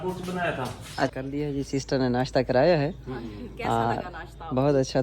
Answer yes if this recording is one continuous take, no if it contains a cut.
no